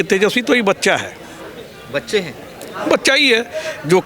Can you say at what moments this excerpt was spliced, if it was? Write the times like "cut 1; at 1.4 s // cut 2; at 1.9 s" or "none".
none